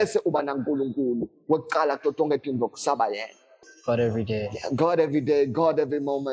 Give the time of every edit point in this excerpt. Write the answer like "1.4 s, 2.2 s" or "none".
3.5 s